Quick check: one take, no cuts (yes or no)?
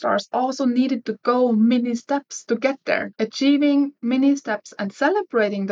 no